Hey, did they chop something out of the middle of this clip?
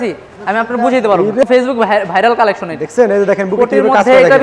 yes; 1 cut; at 1.4 s

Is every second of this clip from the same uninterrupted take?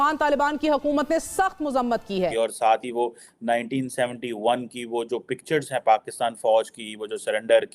no; 1 cut; at 2.3 s

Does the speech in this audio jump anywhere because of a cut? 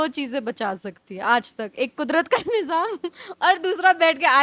no; 0 cuts

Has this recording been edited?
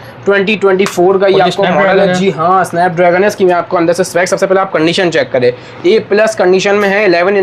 no; 0 cuts

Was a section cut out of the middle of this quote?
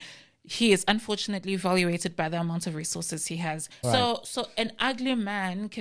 yes; 1 cut; at 3.7 s

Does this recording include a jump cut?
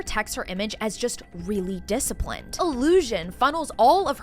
yes; 1 cut; at 2.5 s

